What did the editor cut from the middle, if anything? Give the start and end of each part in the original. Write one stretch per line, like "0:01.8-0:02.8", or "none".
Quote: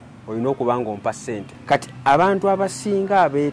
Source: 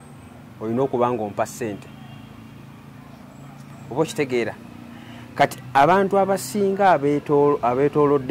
0:01.8-0:05.2

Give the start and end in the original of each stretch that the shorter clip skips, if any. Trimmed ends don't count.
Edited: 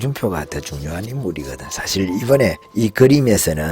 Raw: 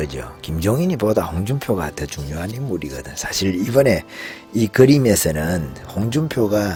0:04.1-0:04.4

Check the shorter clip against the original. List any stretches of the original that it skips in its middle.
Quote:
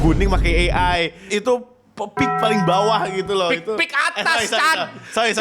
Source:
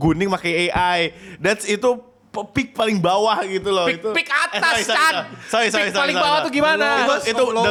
0:01.2-0:01.6

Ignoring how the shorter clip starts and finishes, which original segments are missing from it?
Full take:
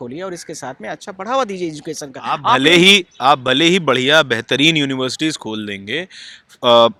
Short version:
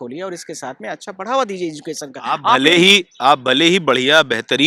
none

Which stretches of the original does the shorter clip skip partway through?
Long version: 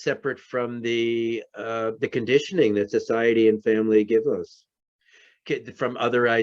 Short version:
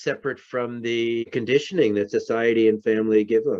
0:01.3-0:02.1

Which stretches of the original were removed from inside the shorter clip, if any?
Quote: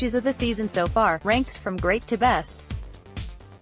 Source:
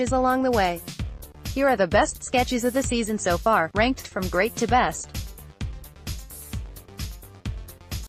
0:05.0-0:06.4

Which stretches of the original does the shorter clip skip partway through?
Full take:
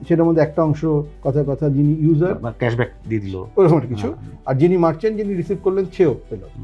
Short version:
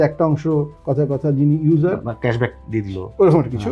none

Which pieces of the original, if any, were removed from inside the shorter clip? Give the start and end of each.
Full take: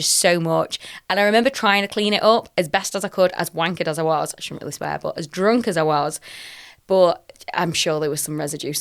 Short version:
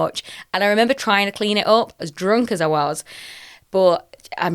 0:02.5-0:05.1

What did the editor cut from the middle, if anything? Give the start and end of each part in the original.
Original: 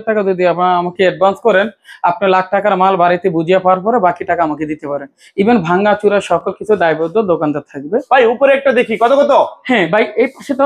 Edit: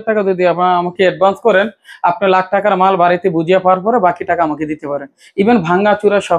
none

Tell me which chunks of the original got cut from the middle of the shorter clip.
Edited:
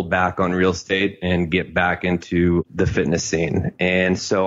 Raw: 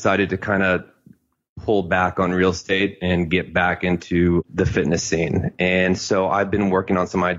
none

